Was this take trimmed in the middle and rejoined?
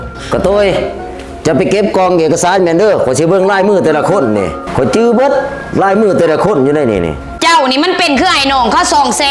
yes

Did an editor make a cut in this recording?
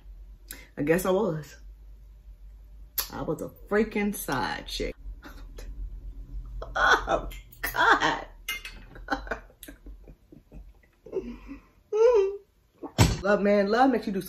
yes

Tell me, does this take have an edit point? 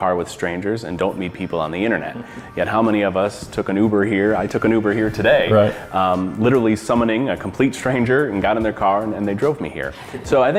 no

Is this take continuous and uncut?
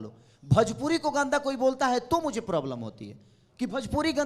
yes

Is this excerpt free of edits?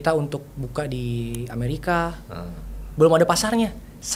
yes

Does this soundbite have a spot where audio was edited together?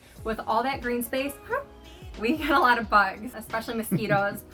no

